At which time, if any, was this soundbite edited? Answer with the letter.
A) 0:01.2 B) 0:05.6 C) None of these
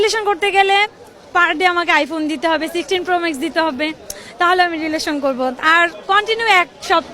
C